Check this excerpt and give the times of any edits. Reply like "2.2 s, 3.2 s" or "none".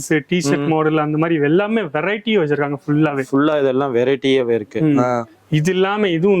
none